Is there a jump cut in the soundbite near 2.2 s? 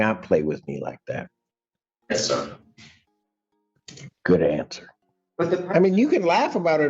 no; 1 cut; at 5.3 s

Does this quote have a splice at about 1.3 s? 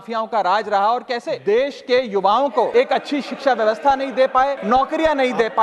yes; 3 cuts; at 1.3 s, 2.7 s, 4.6 s

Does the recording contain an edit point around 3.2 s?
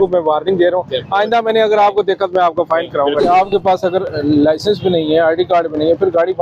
yes; 1 cut; at 3.2 s

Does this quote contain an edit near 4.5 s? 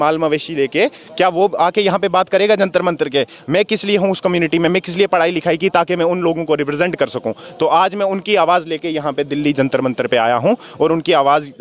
no; 0 cuts

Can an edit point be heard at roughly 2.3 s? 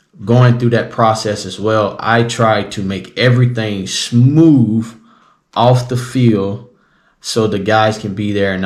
no; 0 cuts

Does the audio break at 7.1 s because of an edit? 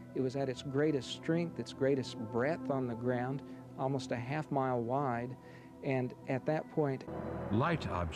yes; 1 cut; at 7.1 s

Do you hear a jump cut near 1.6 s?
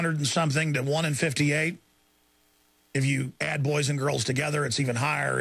no; 1 cut; at 3.3 s

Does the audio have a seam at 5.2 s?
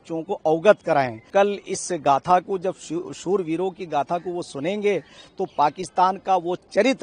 no; 1 cut; at 1.3 s

